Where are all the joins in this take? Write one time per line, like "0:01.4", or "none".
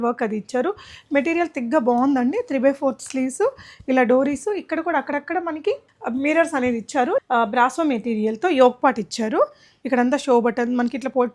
0:07.2